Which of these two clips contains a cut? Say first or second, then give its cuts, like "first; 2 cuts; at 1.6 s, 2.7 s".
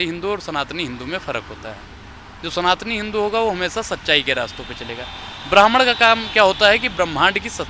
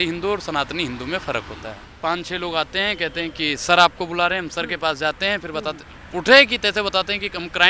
second; 1 cut; at 1.8 s